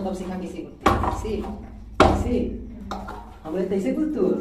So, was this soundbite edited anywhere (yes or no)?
no